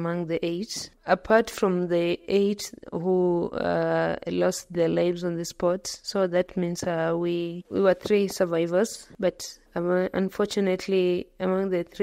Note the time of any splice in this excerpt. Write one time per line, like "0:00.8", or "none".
0:00.9